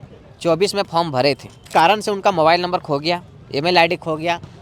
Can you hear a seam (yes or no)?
yes